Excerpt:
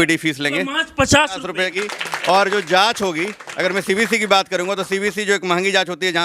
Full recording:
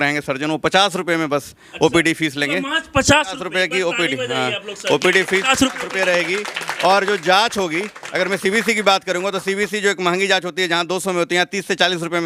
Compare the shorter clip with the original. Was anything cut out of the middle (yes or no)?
yes